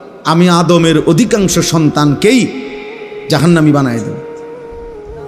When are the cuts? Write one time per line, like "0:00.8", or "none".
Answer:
0:04.2